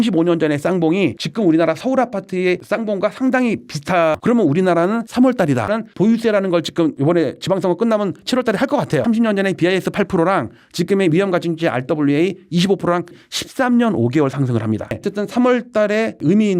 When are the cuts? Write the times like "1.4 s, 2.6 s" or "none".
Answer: 4.2 s, 5.7 s, 9.0 s, 13.2 s